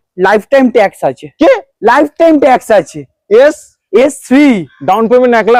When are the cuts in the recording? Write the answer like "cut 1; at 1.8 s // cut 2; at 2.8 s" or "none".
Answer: none